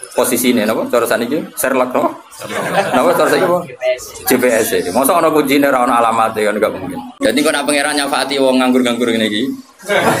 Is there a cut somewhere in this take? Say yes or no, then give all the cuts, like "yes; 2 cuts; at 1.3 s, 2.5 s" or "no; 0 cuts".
yes; 1 cut; at 7.0 s